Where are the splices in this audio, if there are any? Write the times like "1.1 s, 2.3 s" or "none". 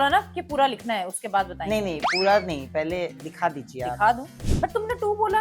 4.3 s